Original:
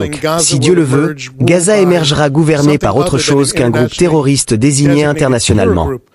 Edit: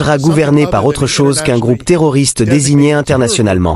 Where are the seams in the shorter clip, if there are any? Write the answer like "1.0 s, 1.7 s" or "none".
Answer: none